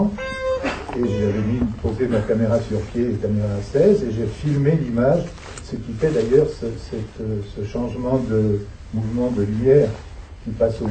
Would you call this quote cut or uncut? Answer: cut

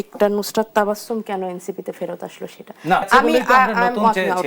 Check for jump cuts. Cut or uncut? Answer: cut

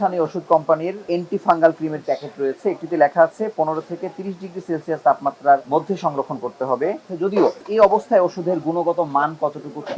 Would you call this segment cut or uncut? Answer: cut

